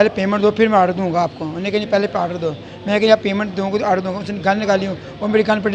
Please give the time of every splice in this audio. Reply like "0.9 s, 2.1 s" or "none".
none